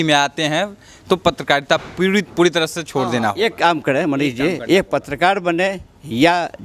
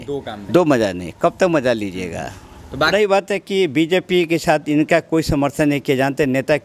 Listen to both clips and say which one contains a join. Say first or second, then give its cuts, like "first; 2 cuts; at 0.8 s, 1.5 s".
second; 1 cut; at 2.9 s